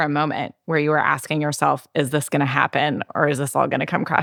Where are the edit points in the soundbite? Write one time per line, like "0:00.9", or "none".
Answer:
none